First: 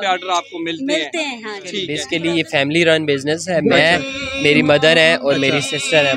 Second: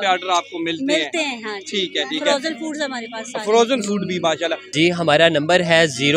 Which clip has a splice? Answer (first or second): first